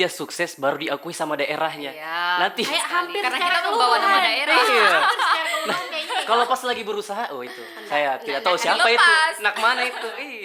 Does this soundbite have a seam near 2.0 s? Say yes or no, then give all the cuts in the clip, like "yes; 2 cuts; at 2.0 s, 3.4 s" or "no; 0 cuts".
no; 0 cuts